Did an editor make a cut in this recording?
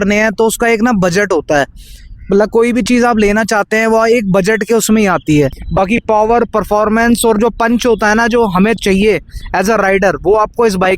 yes; 1 cut; at 5.6 s

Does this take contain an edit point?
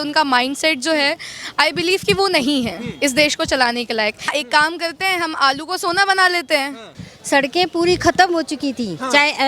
yes; 2 cuts; at 4.3 s, 7.0 s

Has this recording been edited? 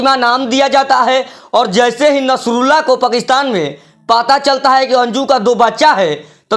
no; 0 cuts

